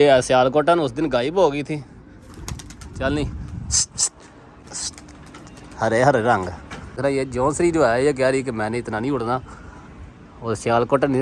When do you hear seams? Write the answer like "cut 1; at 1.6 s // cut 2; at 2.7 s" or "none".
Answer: cut 1; at 4.6 s // cut 2; at 6.9 s